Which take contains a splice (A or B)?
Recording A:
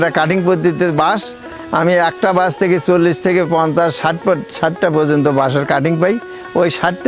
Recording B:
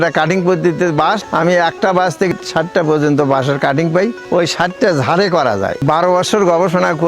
B